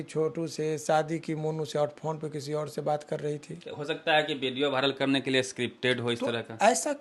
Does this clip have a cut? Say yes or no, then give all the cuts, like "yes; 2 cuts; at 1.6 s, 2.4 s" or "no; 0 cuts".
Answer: no; 0 cuts